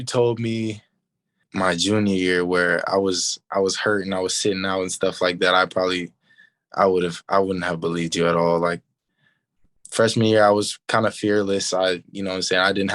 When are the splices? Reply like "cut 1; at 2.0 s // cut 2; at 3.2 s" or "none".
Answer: cut 1; at 1.4 s